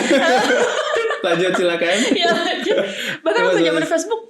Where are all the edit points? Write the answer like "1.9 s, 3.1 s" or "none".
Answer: none